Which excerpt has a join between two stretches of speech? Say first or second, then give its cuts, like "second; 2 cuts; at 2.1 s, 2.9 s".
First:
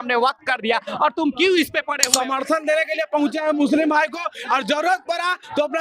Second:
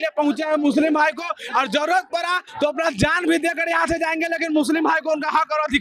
first; 1 cut; at 2.0 s